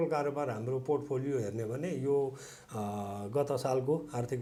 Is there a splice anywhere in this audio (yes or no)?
no